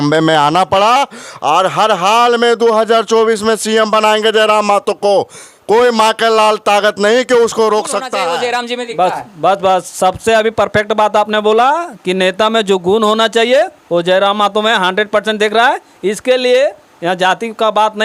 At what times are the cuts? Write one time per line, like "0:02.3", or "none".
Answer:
0:08.3